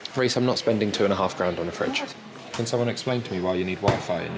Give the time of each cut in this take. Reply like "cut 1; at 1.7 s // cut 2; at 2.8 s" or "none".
cut 1; at 2.2 s